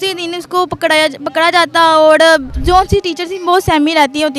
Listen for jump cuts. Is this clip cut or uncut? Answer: cut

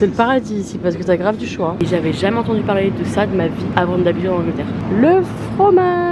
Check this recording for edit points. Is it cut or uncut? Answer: cut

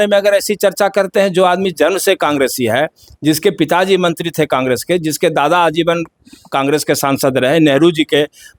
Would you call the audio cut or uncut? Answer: uncut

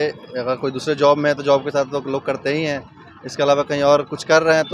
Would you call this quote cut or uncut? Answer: uncut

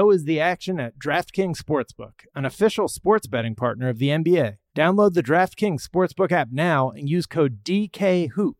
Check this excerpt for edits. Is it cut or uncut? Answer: cut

